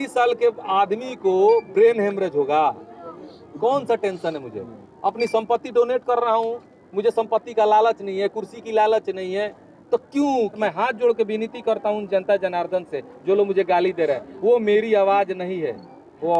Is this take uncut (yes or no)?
no